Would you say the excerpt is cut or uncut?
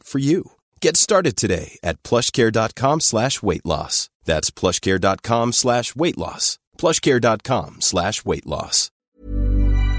cut